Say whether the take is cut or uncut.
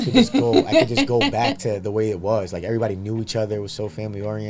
uncut